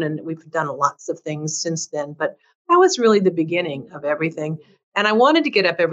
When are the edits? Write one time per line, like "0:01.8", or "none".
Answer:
none